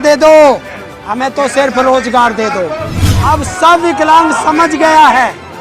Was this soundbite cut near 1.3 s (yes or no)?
no